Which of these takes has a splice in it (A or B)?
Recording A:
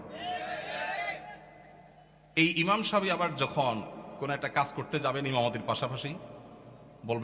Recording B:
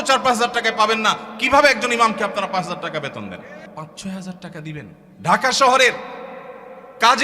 B